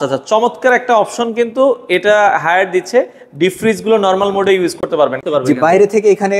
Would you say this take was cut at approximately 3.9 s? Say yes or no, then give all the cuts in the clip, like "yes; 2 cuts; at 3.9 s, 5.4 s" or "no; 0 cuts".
no; 1 cut; at 5.2 s